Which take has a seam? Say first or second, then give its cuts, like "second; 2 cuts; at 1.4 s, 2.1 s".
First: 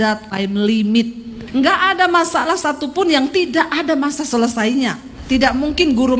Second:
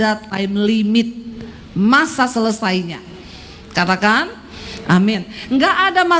first; 2 cuts; at 1.4 s, 5.1 s